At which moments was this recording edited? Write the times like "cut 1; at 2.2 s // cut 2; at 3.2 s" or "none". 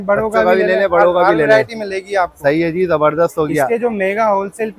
none